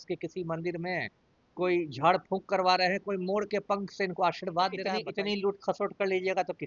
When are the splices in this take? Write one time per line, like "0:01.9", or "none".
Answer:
0:05.0